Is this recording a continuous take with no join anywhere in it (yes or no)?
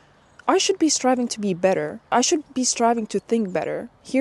no